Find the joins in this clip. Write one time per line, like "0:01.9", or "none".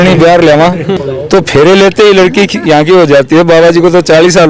0:00.9